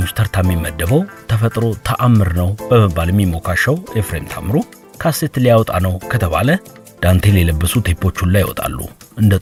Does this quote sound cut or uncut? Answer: uncut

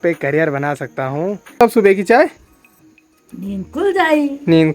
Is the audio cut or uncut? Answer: cut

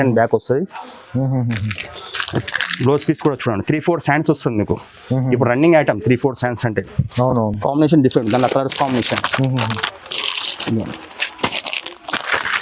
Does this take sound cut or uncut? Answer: uncut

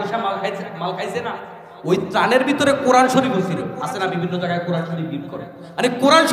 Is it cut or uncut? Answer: uncut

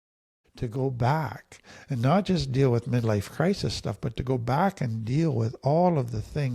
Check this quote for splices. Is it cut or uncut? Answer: uncut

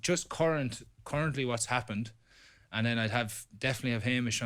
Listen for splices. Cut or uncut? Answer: uncut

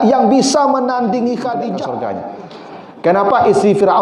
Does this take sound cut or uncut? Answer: cut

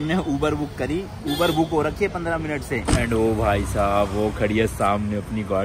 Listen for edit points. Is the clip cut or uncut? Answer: cut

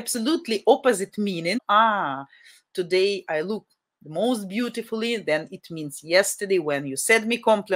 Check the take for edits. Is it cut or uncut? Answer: cut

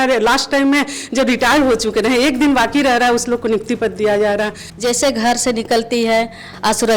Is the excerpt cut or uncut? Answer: cut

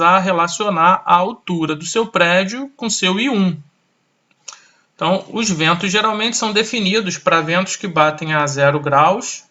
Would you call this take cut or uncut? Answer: uncut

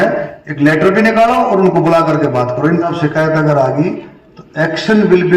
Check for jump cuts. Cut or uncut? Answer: cut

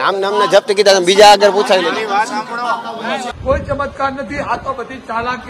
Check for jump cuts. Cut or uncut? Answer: cut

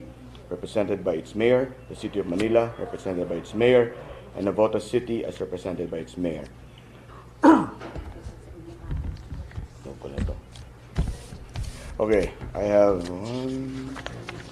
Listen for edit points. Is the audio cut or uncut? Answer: uncut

